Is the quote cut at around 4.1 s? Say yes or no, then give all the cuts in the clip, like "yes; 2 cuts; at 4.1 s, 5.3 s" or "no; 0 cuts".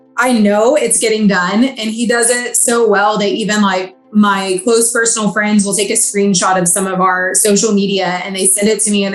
no; 0 cuts